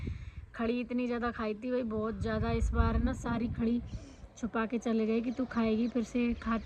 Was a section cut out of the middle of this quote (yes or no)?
no